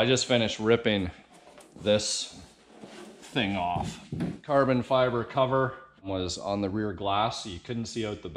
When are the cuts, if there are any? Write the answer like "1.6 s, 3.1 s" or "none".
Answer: 4.4 s, 6.1 s